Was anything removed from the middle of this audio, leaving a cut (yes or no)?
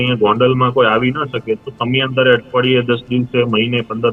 no